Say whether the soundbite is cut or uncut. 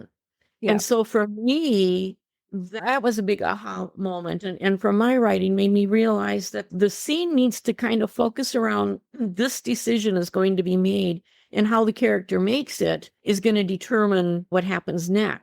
cut